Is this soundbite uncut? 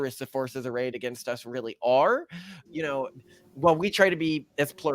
no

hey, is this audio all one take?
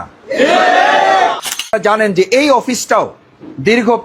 no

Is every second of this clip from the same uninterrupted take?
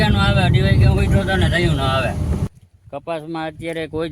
no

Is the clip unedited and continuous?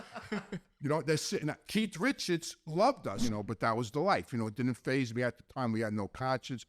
no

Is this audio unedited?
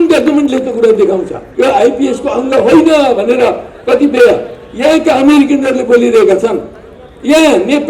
no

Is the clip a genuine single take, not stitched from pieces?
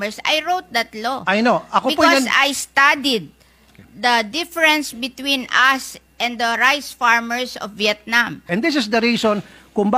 no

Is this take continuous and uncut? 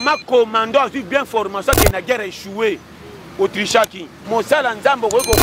no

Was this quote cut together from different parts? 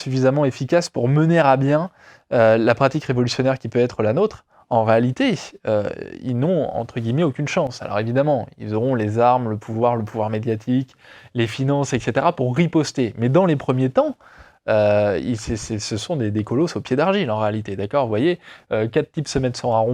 no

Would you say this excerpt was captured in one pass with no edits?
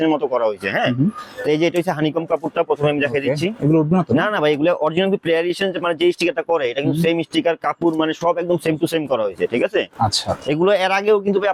yes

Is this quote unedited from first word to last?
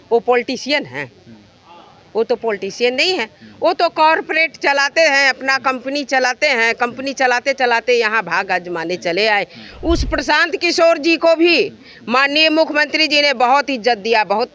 yes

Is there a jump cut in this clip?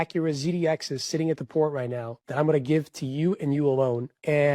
no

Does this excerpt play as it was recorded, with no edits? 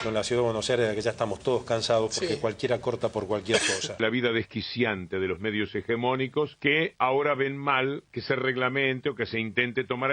no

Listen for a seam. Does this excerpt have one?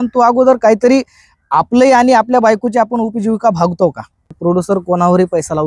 yes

